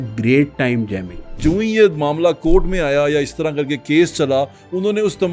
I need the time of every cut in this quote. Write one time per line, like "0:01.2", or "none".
0:01.4